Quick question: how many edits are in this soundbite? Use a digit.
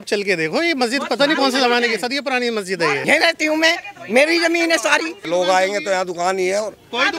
2